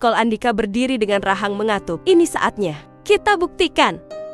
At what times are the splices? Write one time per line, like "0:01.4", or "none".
0:01.9